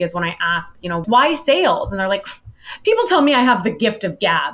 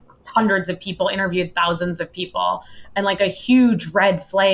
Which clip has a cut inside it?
first; 1 cut; at 1.0 s

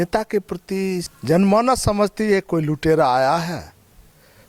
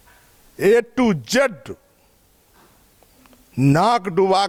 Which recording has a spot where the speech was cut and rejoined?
first; 1 cut; at 1.1 s

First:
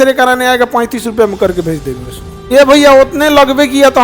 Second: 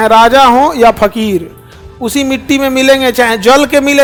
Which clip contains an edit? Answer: first; 1 cut; at 2.3 s

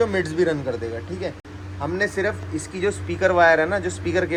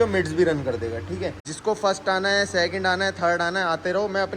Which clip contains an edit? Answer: second; 1 cut; at 1.4 s

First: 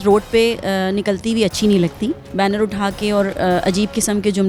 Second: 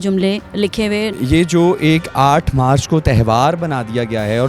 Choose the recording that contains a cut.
second; 1 cut; at 1.1 s

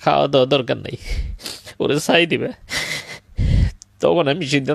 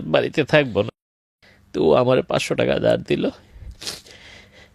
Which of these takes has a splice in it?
second; 1 cut; at 1.0 s

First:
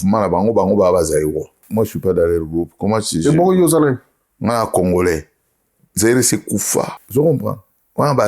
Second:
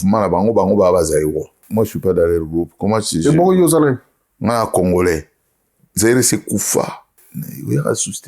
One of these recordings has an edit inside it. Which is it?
first; 1 cut; at 7.0 s

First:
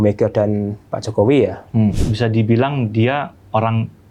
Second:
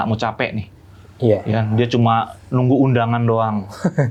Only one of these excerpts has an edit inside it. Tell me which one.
first; 1 cut; at 1.9 s

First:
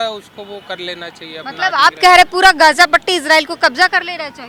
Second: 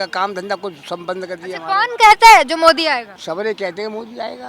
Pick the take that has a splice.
second; 1 cut; at 3.1 s

